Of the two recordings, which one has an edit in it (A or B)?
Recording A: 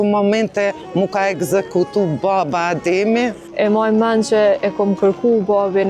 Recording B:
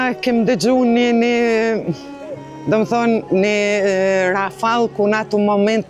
A